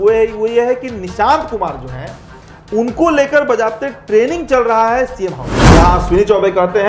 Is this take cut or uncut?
cut